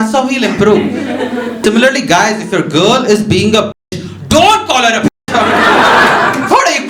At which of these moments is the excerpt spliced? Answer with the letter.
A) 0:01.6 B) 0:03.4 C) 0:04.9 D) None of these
A